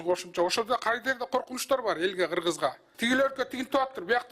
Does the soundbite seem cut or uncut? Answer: cut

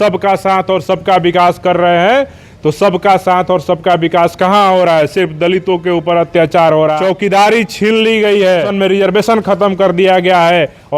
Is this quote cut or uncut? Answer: cut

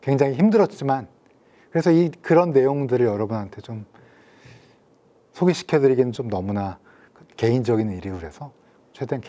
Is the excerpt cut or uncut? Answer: uncut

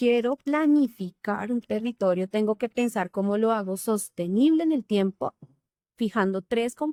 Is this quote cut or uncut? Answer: uncut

